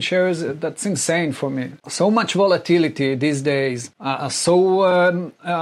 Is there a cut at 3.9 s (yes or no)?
yes